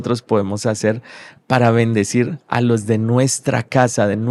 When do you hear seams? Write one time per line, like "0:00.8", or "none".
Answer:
none